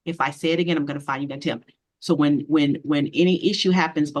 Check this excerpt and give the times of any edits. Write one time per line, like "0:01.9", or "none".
none